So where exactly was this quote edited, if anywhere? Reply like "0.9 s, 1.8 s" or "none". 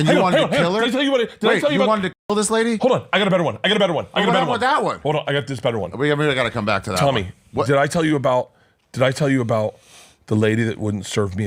none

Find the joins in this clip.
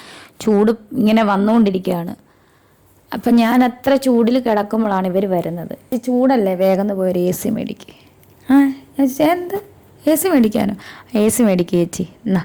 5.9 s

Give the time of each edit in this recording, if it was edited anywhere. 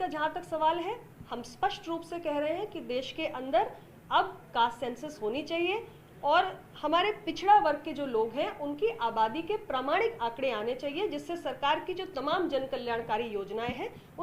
none

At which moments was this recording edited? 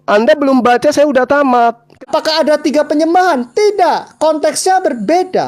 1.9 s

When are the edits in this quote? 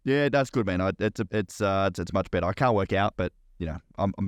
none

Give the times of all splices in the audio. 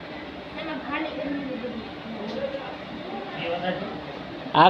none

